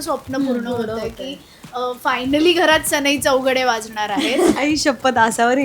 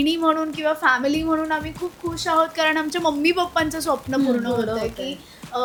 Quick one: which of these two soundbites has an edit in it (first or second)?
first